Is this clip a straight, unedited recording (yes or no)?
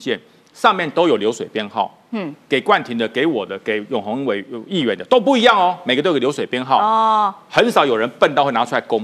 yes